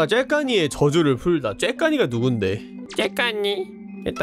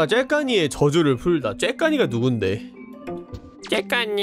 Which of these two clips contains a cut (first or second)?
first